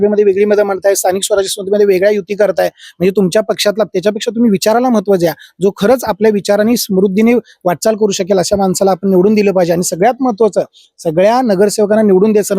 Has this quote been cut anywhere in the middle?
no; 0 cuts

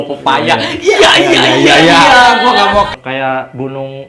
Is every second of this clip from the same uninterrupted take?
no; 1 cut; at 2.9 s

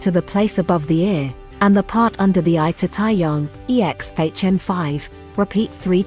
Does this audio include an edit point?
no; 0 cuts

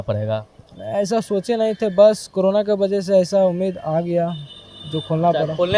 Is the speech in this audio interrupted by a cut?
no; 0 cuts

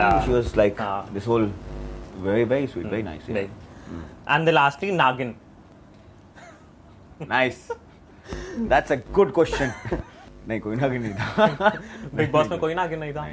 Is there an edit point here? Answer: no; 0 cuts

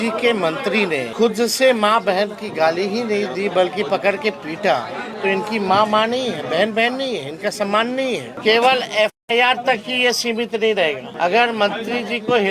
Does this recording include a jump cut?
yes; 4 cuts; at 1.1 s, 5.0 s, 8.3 s, 11.1 s

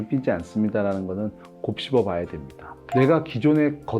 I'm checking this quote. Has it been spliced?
yes; 1 cut; at 2.8 s

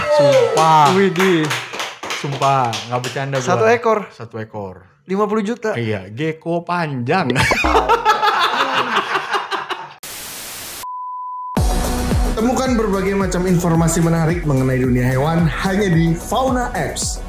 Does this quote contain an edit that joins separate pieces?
yes; 2 cuts; at 10.0 s, 11.5 s

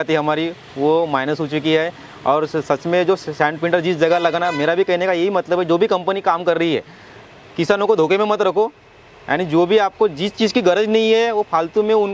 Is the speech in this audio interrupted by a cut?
no; 0 cuts

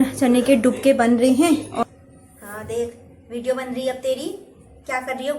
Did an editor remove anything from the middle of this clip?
yes; 1 cut; at 1.8 s

